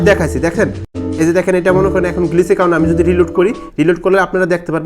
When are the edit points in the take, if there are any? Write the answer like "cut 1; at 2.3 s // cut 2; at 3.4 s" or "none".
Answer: cut 1; at 1.0 s